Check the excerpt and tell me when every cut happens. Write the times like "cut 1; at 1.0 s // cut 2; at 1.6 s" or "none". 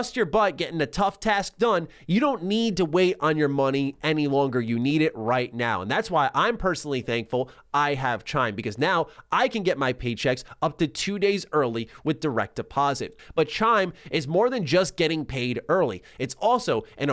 cut 1; at 13.1 s

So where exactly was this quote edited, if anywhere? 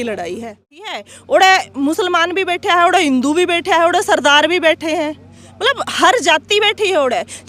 cut 1; at 0.9 s

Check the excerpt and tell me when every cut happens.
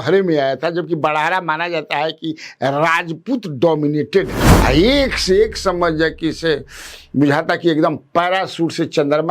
cut 1; at 4.4 s

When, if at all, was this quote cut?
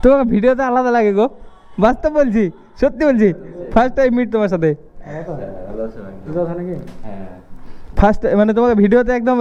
none

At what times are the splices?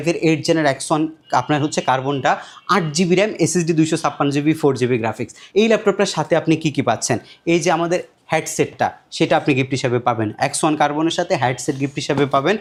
none

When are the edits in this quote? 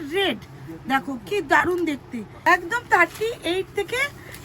cut 1; at 2.3 s

